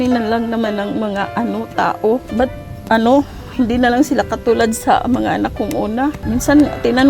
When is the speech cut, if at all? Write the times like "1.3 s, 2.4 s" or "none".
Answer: 2.3 s, 6.2 s